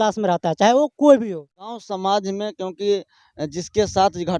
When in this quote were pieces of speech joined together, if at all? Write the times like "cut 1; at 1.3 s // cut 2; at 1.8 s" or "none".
cut 1; at 1.8 s

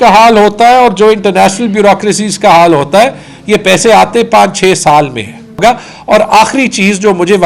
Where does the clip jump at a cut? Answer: cut 1; at 5.6 s

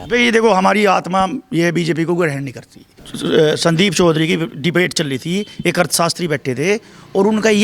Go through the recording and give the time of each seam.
cut 1; at 3.0 s

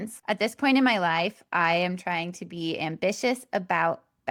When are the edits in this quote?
none

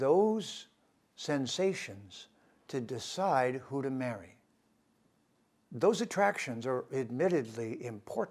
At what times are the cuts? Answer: none

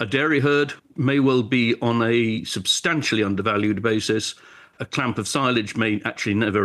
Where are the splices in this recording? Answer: cut 1; at 0.9 s // cut 2; at 4.7 s

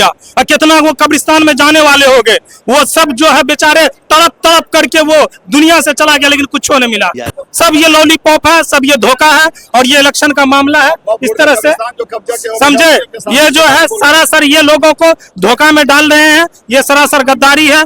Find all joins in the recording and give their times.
none

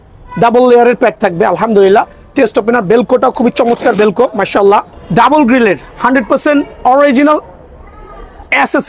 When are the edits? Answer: cut 1; at 5.0 s

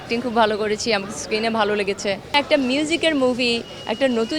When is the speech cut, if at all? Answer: cut 1; at 2.3 s

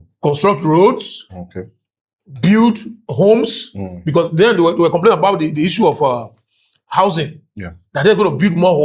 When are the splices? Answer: cut 1; at 3.0 s

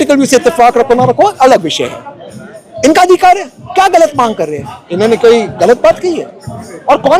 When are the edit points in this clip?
none

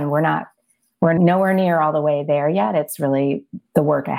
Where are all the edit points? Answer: cut 1; at 1.2 s

